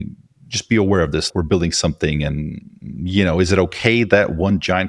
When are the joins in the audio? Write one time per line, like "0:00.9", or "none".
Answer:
0:01.3